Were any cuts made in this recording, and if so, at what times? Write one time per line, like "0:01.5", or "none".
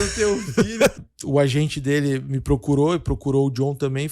0:01.1